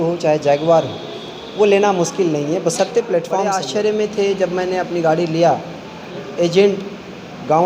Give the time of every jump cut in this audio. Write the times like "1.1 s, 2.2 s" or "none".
3.6 s, 6.2 s